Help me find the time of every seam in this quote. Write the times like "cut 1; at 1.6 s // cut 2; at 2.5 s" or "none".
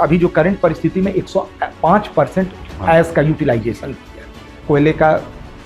cut 1; at 4.6 s

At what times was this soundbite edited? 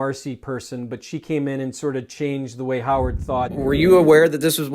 cut 1; at 3.5 s

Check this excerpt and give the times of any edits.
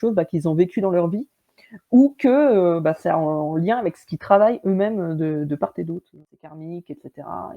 cut 1; at 6.2 s

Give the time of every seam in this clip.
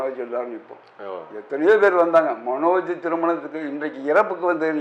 none

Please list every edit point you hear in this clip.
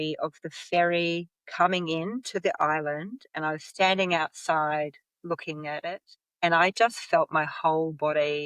none

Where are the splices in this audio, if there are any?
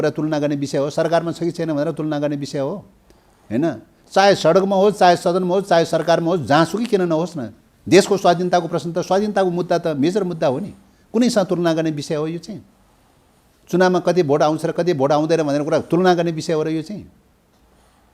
none

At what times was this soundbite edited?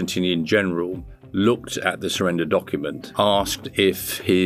cut 1; at 3.0 s

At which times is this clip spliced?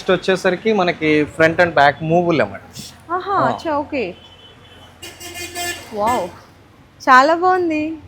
none

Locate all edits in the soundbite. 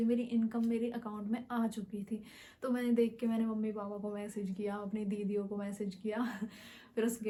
none

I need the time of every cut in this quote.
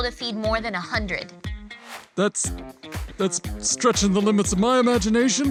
none

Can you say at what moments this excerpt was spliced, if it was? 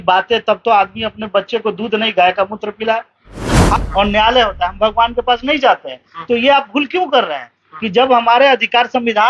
cut 1; at 3.8 s

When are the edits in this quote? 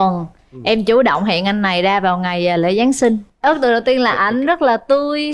none

